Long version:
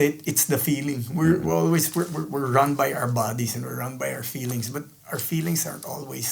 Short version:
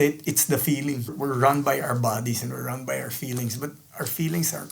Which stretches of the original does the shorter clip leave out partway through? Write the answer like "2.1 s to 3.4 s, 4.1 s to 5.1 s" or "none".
1.1 s to 2.2 s

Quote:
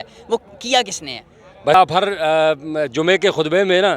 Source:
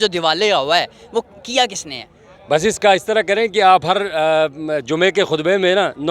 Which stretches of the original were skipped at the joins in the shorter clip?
2.6 s to 3.7 s

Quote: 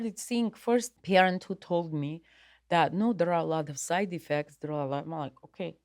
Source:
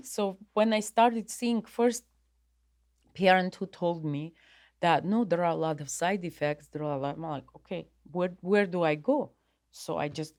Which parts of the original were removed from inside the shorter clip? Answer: 2.1 s to 3.1 s

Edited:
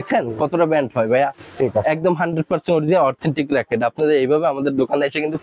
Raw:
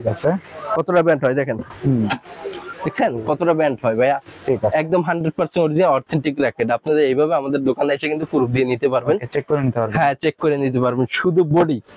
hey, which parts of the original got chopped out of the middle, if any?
none

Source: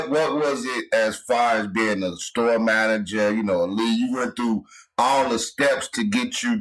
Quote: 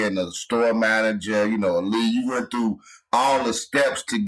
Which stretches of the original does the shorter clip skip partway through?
none

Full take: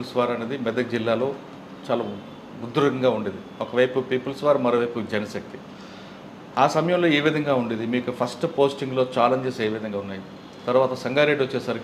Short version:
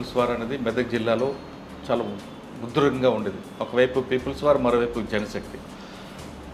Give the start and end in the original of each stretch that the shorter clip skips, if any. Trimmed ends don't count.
none

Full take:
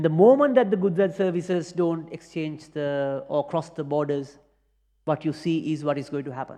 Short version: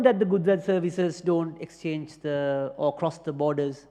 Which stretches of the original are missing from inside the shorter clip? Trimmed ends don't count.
none

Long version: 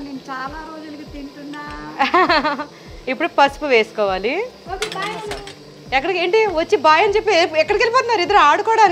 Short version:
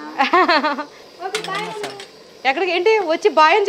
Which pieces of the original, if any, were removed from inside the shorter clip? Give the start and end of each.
2.9 s to 4.6 s

